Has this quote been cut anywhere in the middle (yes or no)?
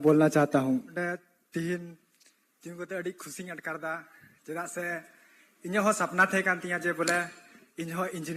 yes